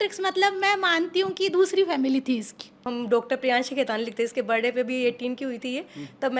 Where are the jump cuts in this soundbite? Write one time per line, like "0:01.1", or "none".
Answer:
0:02.9